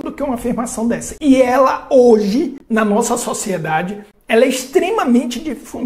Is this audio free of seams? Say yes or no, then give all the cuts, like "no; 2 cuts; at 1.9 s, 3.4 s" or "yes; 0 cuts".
yes; 0 cuts